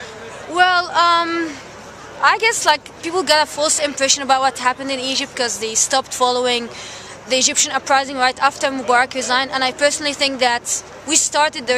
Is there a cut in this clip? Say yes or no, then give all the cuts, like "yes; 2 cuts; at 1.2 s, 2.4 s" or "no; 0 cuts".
yes; 1 cut; at 6.4 s